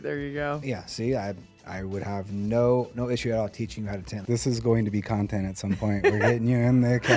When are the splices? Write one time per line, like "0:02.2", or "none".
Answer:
0:04.1